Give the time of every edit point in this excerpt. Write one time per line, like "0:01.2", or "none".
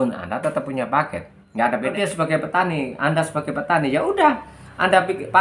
0:01.9